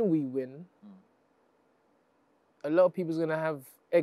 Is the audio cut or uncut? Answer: uncut